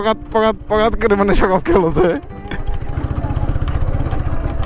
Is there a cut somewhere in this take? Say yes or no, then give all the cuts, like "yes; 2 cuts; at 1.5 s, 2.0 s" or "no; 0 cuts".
no; 0 cuts